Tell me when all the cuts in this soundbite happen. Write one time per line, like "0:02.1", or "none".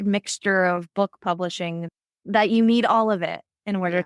none